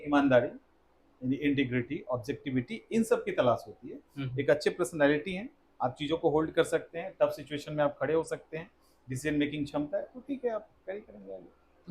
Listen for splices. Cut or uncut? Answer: uncut